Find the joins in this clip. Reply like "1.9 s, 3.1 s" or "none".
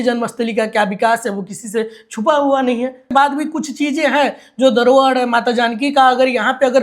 3.1 s